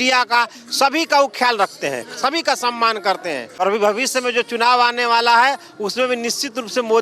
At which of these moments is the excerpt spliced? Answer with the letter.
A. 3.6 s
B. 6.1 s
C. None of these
A